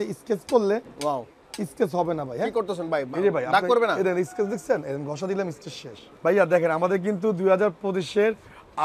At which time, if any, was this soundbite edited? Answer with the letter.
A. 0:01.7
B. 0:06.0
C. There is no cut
B